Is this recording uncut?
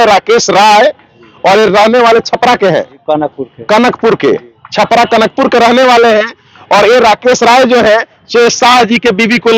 yes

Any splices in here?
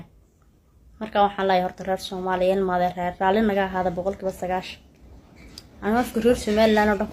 no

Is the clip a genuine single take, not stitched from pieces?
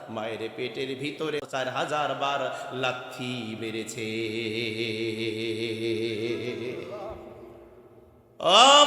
no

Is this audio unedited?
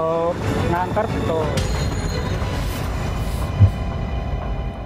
yes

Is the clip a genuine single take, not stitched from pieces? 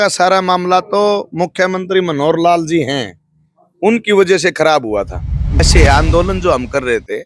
no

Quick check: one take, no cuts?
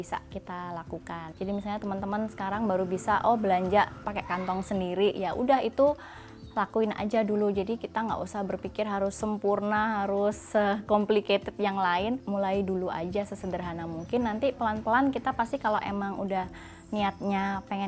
no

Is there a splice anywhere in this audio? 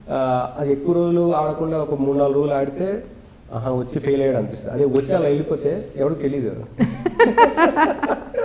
no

